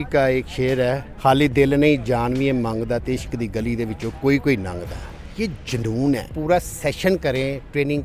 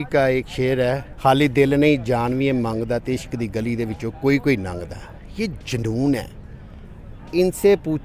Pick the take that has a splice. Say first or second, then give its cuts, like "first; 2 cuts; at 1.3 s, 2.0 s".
first; 1 cut; at 6.3 s